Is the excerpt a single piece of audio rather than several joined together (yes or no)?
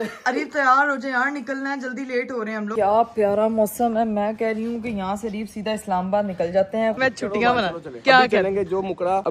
no